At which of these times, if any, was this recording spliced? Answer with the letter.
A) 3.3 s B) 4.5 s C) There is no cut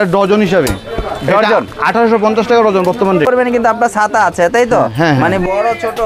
A